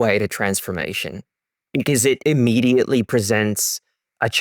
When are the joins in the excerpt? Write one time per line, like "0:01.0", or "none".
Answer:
0:02.2